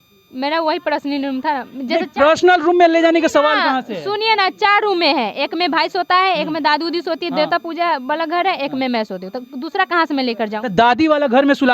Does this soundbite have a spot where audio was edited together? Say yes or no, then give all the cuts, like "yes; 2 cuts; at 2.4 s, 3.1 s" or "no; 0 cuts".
no; 0 cuts